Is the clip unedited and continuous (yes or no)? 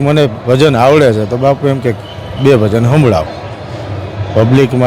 yes